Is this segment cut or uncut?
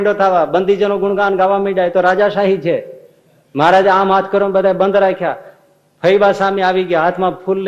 uncut